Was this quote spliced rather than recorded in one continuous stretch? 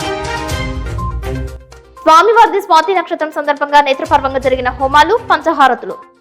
yes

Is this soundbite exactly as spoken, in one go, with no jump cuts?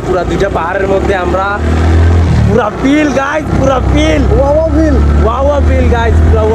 yes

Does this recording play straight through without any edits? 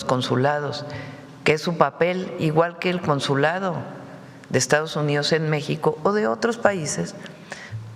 yes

